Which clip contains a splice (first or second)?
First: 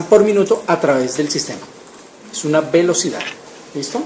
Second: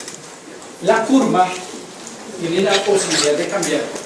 second